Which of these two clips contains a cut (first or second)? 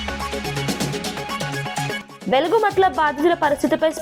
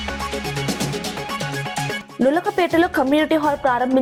first